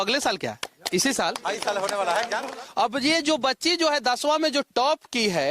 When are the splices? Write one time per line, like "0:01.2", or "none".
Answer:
0:02.5

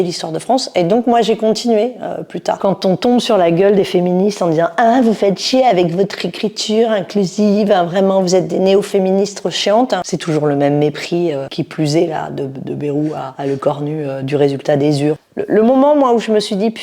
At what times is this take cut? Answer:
0:02.6
0:10.0
0:11.5
0:15.2

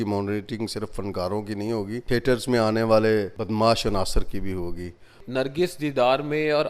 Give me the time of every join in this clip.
0:02.0
0:03.4
0:05.2

